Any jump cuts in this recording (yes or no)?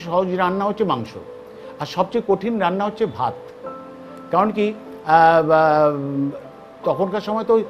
no